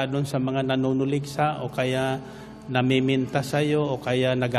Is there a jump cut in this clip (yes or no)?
no